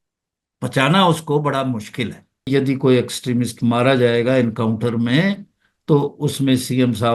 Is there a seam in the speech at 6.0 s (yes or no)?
no